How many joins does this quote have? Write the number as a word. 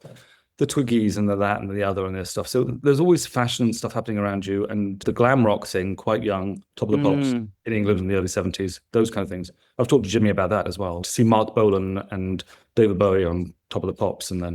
zero